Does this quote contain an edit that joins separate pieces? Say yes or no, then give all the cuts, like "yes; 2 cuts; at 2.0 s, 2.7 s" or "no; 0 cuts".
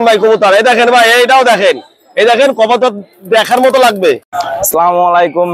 no; 0 cuts